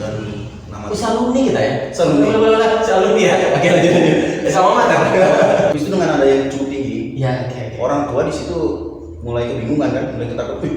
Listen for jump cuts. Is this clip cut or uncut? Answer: cut